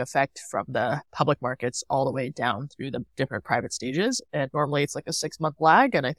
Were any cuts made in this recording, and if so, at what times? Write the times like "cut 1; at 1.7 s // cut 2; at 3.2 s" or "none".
cut 1; at 4.3 s